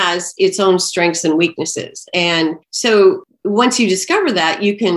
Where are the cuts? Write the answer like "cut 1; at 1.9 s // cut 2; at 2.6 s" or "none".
cut 1; at 2.7 s // cut 2; at 3.2 s